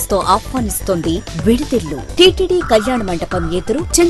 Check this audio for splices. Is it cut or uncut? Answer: cut